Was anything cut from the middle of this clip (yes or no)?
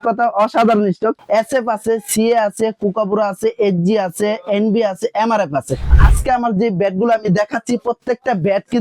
yes